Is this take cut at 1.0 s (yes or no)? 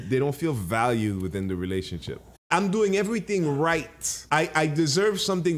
no